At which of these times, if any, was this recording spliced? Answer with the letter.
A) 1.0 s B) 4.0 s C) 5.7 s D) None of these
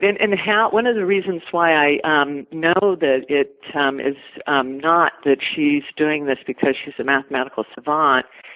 D